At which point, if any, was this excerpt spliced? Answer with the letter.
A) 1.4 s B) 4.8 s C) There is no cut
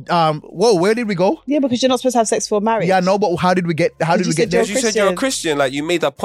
C